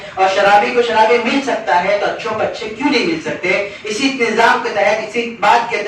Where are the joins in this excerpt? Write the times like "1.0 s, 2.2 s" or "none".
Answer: none